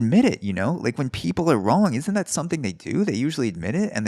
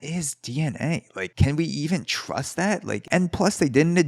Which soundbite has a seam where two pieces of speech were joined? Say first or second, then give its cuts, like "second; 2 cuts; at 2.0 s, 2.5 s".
second; 2 cuts; at 1.3 s, 3.0 s